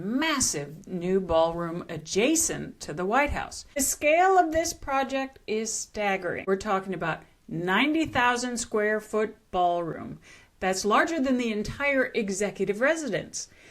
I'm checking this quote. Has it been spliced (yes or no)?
yes